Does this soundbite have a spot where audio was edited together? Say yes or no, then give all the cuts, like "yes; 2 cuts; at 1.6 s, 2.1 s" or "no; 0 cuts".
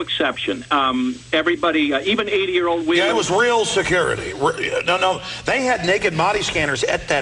no; 0 cuts